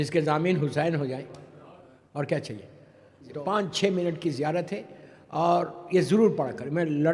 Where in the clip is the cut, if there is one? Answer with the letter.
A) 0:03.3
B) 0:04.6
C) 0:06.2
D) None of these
A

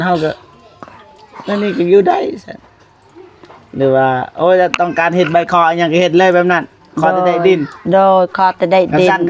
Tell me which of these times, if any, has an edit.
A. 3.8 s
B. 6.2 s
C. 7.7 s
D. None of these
D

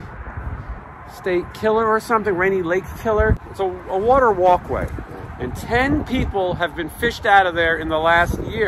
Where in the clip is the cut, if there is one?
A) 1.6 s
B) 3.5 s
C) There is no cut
B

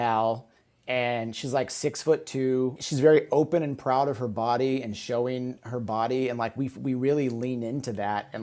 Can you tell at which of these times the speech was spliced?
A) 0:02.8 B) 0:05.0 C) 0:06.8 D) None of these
A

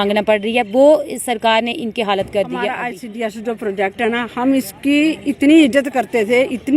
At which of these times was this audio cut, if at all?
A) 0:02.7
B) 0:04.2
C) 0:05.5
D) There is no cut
A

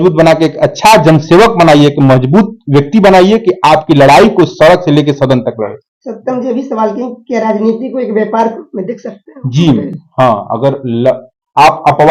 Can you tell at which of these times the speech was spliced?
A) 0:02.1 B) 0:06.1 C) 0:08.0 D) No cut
D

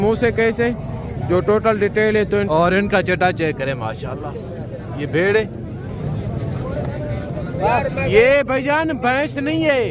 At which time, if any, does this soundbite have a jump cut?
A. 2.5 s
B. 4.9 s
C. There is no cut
A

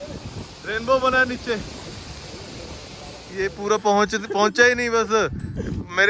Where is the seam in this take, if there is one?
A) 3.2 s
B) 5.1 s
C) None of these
A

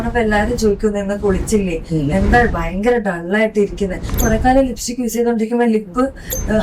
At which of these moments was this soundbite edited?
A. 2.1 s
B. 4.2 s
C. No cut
B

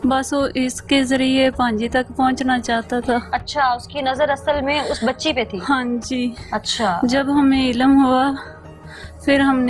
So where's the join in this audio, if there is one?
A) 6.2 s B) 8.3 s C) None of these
C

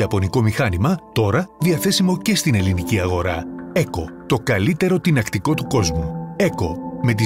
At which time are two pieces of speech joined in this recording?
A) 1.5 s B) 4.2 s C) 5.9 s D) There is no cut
D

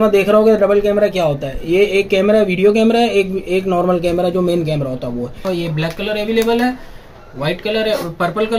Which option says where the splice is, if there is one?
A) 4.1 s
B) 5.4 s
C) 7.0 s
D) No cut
B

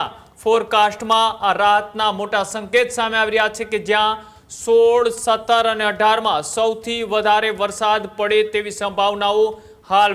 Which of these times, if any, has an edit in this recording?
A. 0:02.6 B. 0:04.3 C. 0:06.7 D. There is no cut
D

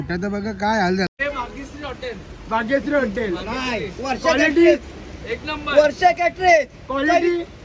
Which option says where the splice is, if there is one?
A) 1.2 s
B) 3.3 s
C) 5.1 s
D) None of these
A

